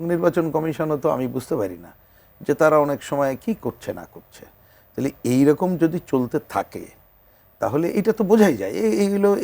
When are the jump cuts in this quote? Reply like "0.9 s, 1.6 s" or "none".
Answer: none